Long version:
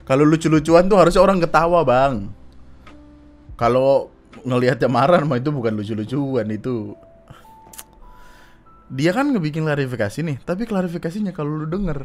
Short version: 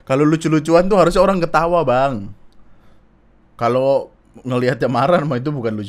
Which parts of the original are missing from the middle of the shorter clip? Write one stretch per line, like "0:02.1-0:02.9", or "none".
none